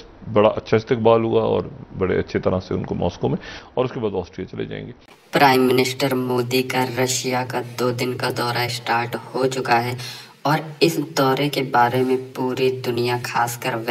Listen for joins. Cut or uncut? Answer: uncut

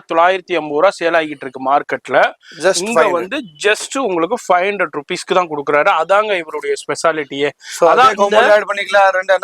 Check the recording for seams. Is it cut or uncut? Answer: uncut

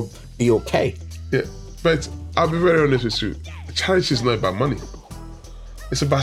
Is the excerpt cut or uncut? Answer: uncut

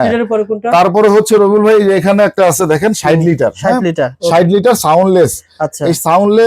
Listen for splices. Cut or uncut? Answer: uncut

